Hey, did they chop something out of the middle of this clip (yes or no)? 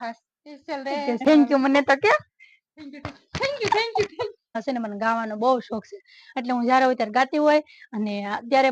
yes